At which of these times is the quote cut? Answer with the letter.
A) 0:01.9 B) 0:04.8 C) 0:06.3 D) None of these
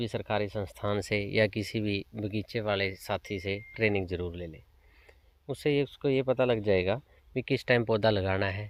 D